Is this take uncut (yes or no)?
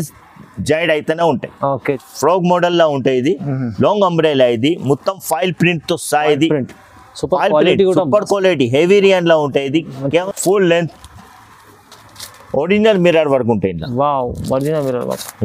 no